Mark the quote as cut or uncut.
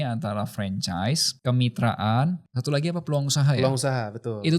cut